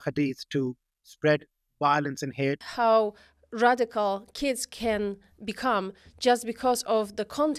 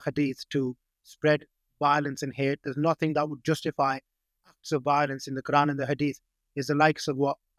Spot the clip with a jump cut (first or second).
first